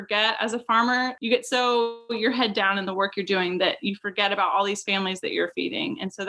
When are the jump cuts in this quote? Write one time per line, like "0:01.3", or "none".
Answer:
0:01.2